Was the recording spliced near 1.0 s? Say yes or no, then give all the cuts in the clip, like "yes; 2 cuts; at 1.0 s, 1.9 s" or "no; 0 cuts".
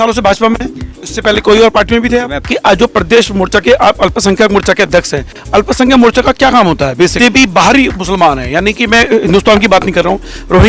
yes; 3 cuts; at 1.0 s, 2.4 s, 7.1 s